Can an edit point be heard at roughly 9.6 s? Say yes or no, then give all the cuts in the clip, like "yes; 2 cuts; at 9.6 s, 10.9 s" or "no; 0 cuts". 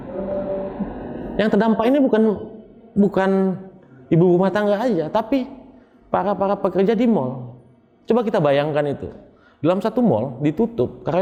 no; 0 cuts